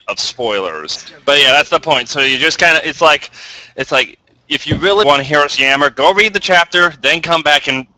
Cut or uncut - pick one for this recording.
cut